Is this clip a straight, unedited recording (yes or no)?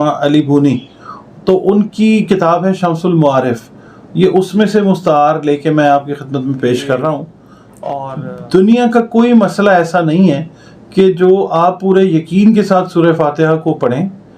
no